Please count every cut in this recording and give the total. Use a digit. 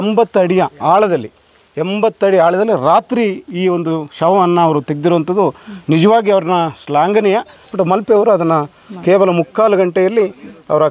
1